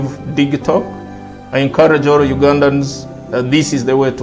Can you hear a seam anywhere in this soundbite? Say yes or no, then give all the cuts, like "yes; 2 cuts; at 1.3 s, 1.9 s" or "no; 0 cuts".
no; 0 cuts